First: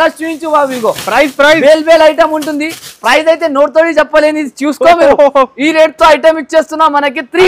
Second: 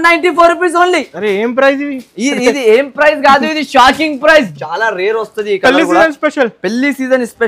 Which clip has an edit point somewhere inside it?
second; 1 cut; at 4.5 s

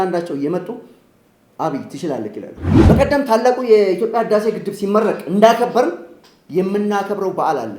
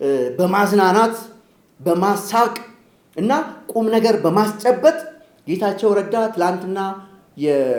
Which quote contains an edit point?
first; 1 cut; at 2.7 s

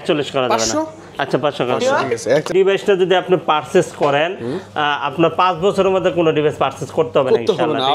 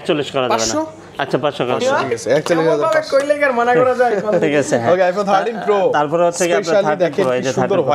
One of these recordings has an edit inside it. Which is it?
first; 1 cut; at 2.5 s

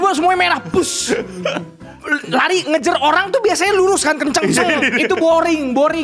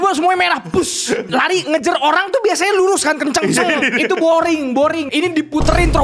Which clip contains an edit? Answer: second; 2 cuts; at 1.3 s, 5.0 s

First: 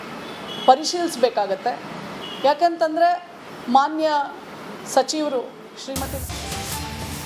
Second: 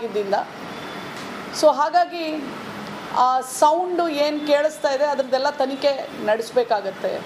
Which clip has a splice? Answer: first; 1 cut; at 6.2 s

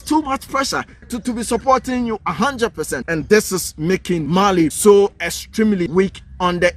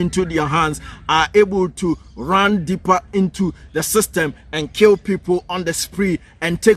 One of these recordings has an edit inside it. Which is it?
first; 4 cuts; at 1.1 s, 3.0 s, 4.6 s, 5.9 s

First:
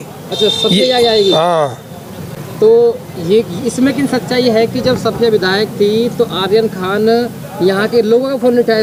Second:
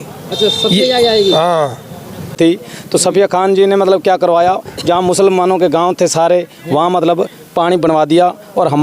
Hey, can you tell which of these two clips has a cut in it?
second; 1 cut; at 2.3 s

